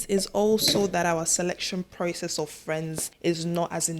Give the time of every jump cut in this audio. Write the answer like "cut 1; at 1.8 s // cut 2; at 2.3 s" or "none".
cut 1; at 3.1 s